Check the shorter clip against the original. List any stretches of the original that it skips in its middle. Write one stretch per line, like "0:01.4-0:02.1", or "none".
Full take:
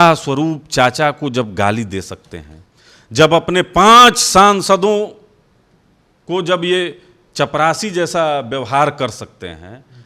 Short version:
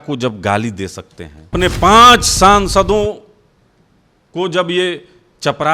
0:02.6-0:03.4